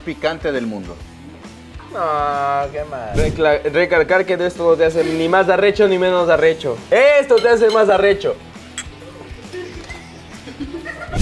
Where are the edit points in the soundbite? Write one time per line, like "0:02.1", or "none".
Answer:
none